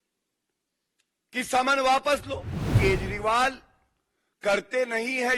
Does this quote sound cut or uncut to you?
cut